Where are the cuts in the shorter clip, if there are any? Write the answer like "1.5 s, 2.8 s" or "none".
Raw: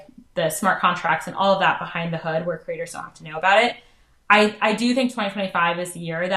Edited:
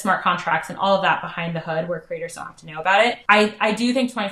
3.2 s